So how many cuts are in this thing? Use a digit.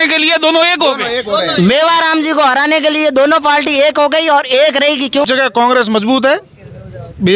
1